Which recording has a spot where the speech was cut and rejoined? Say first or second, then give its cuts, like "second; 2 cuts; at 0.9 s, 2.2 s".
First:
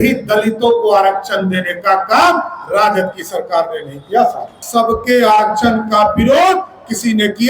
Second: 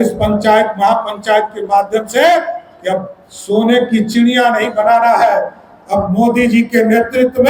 first; 1 cut; at 4.5 s